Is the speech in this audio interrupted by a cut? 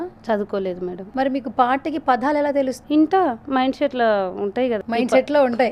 yes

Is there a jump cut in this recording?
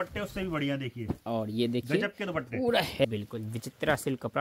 yes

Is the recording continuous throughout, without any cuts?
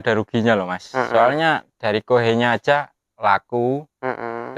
yes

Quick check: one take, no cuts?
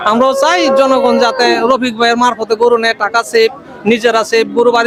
yes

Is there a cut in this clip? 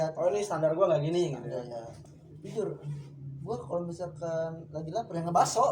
yes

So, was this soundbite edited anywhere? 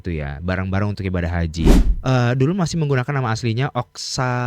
yes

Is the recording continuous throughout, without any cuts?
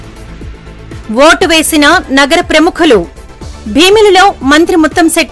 no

